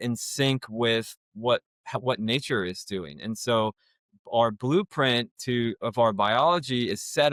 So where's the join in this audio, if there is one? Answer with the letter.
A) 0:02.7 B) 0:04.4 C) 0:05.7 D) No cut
D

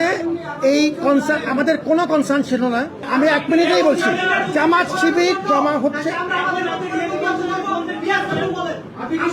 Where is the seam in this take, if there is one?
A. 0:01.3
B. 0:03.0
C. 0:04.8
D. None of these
B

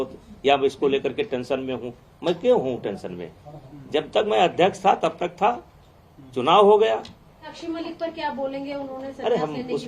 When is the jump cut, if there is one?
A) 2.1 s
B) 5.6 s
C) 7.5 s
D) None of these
C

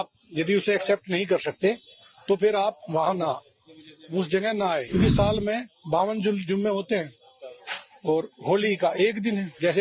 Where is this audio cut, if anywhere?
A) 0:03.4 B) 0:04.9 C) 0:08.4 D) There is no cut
B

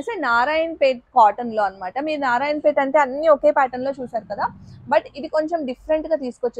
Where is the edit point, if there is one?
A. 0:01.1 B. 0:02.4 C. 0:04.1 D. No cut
D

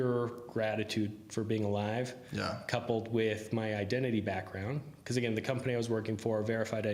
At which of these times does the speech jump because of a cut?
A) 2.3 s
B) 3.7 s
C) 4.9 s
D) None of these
D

